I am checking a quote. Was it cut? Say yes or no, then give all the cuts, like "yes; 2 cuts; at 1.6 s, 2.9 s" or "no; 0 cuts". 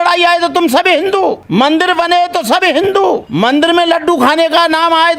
yes; 2 cuts; at 1.4 s, 3.3 s